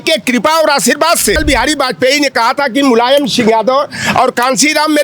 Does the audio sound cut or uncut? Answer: cut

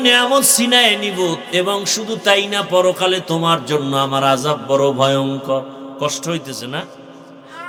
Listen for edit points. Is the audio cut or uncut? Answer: uncut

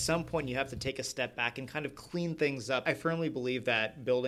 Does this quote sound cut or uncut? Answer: cut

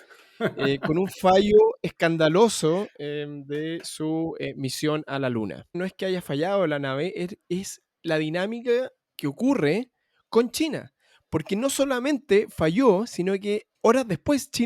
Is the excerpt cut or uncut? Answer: cut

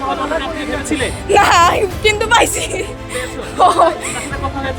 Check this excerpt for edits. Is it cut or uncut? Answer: uncut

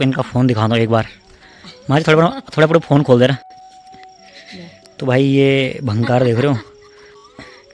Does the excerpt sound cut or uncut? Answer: uncut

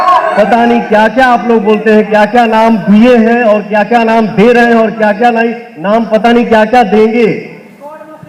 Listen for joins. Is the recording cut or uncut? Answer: uncut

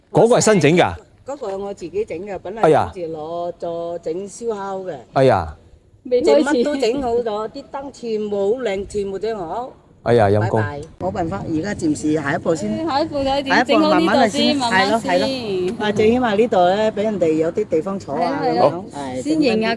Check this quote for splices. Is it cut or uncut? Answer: cut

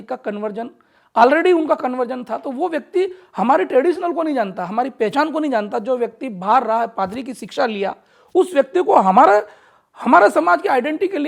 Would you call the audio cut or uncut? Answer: uncut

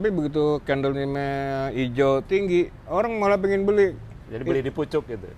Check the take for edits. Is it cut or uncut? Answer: uncut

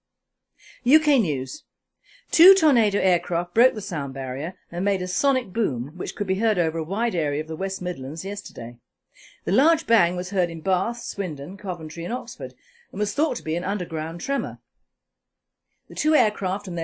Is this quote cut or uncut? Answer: cut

